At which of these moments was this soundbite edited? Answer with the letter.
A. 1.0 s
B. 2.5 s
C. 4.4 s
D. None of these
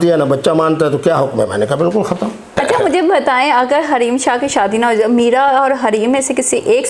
B